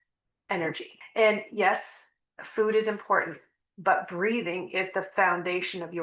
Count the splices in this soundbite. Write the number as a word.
one